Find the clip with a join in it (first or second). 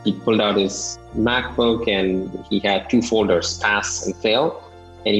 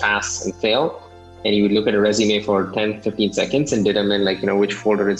first